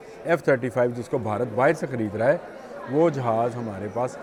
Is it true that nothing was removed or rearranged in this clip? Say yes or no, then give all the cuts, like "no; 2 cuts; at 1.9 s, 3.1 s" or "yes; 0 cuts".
yes; 0 cuts